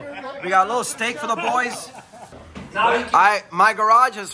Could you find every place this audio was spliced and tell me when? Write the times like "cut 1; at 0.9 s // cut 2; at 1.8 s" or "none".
cut 1; at 2.3 s